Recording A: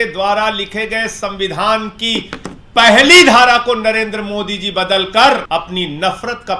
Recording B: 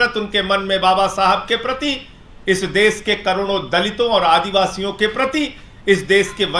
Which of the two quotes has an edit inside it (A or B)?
A